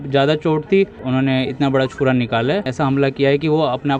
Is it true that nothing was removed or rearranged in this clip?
no; 2 cuts; at 1.0 s, 2.7 s

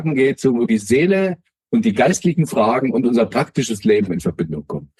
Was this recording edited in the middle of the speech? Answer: no; 0 cuts

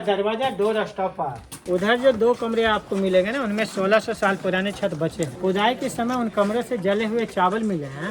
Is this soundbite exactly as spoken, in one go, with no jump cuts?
no; 2 cuts; at 1.7 s, 5.3 s

